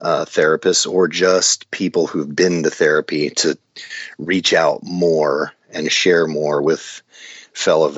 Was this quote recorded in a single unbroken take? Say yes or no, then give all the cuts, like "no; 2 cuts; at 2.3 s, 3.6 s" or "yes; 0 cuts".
yes; 0 cuts